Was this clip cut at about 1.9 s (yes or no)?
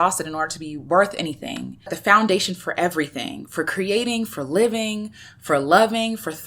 yes